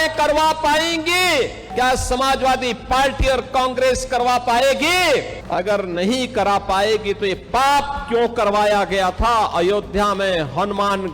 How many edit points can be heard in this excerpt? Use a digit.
2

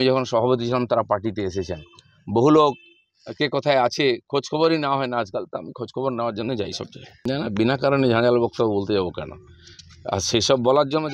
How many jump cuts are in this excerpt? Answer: 1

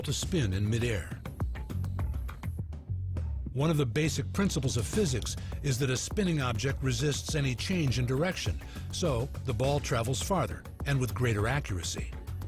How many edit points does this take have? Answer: 1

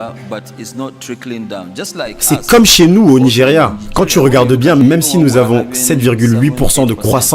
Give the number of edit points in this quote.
1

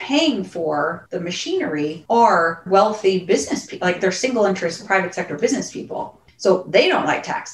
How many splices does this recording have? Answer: 3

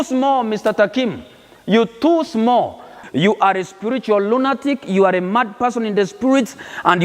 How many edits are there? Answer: 1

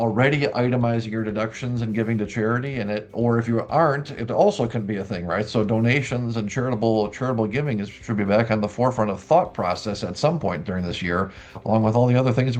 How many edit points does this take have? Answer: 0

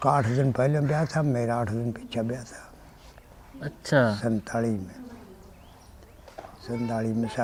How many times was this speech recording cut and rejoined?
0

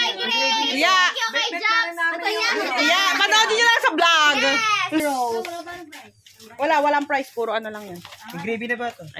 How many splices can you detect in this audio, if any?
1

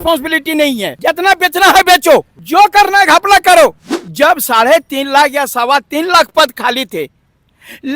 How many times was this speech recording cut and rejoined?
3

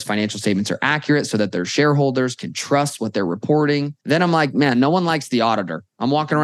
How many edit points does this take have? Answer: 1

